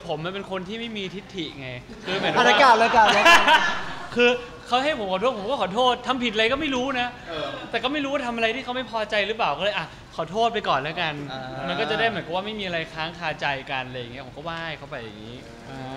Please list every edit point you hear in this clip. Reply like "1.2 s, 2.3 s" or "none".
none